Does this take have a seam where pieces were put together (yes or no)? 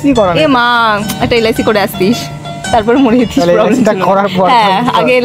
no